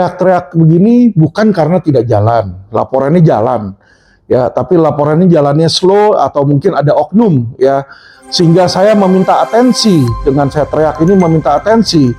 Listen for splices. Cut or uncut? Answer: uncut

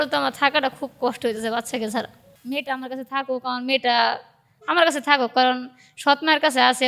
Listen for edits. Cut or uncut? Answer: cut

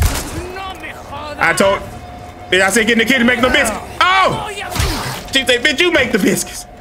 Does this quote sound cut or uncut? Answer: uncut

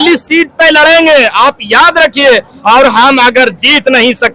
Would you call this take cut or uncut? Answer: uncut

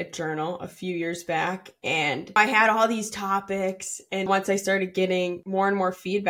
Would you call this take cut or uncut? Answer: cut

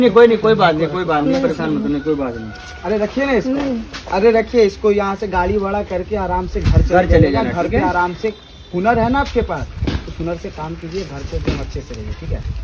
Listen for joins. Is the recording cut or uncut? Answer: uncut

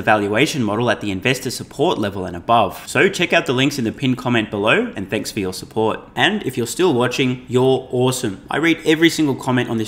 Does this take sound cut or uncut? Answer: uncut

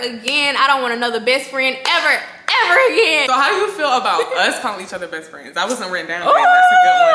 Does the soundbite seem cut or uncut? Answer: cut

